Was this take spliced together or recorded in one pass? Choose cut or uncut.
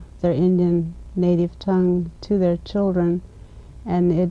cut